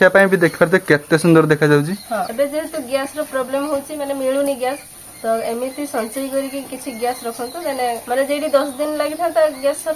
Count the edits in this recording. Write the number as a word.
two